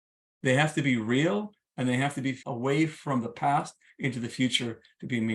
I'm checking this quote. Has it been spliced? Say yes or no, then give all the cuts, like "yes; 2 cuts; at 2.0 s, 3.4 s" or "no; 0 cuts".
yes; 1 cut; at 2.4 s